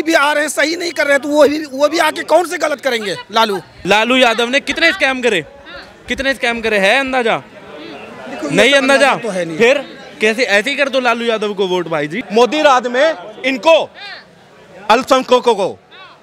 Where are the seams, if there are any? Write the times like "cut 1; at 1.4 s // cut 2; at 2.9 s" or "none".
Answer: cut 1; at 3.7 s // cut 2; at 12.2 s